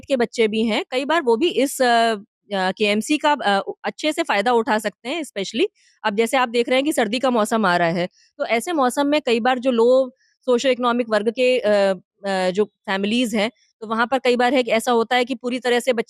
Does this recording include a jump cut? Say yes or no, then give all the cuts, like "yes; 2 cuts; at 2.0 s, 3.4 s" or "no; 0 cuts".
no; 0 cuts